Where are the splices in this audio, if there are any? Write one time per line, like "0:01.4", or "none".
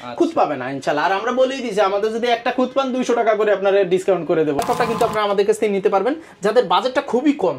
0:04.6